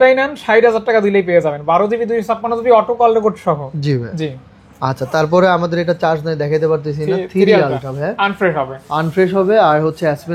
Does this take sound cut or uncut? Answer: uncut